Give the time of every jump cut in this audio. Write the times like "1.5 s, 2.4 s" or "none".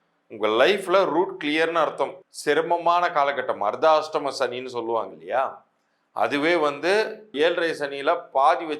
2.2 s, 7.3 s